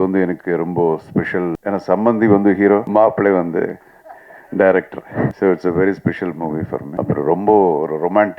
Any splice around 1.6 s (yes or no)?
yes